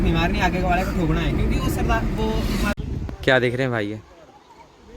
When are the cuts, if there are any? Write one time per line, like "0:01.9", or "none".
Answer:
0:02.8